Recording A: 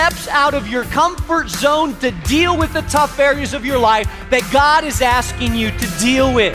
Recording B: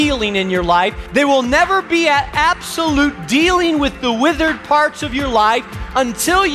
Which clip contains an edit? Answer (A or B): B